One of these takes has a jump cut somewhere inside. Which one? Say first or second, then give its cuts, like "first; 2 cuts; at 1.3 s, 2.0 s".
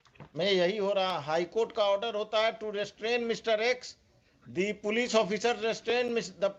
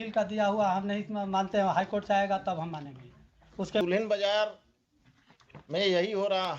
second; 1 cut; at 3.8 s